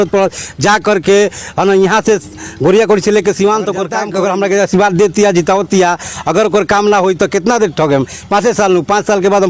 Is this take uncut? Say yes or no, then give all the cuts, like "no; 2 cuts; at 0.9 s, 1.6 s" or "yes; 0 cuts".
no; 1 cut; at 4.0 s